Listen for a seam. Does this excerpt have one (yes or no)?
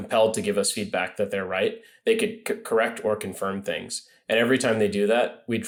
no